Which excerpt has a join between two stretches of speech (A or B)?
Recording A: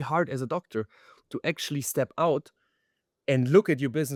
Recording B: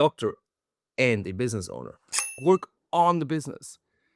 B